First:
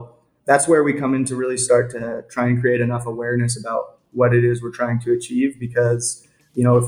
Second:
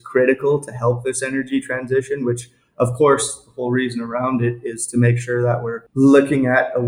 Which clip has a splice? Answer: second; 1 cut; at 5.8 s

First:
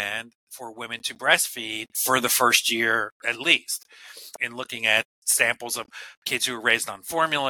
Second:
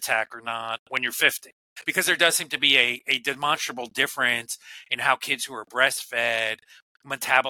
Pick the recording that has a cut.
first; 3 cuts; at 2.0 s, 4.4 s, 5.2 s

